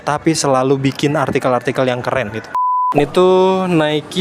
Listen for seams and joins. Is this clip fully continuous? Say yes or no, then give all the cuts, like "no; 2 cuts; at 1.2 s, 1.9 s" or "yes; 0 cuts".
no; 1 cut; at 2.7 s